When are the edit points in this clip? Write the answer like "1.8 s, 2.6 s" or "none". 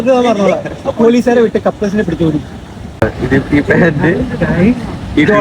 3.0 s